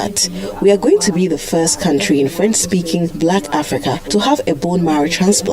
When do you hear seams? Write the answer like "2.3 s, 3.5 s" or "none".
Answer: 3.1 s